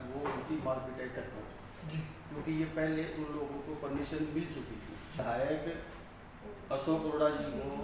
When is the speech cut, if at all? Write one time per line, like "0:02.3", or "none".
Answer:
0:05.1